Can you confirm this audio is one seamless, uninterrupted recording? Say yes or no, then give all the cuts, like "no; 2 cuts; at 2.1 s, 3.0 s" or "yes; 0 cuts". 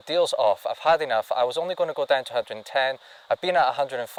yes; 0 cuts